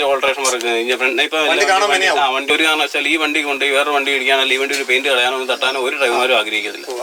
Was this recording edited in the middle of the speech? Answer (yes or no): yes